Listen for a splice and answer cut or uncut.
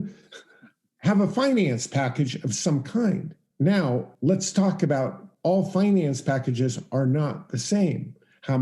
cut